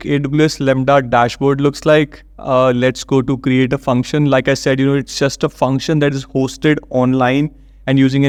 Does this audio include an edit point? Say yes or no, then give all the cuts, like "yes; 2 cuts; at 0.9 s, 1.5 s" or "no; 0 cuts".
no; 0 cuts